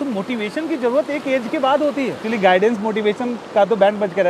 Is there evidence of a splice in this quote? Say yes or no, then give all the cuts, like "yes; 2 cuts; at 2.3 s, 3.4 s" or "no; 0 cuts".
yes; 1 cut; at 2.2 s